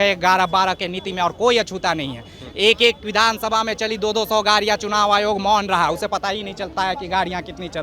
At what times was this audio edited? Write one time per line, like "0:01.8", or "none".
none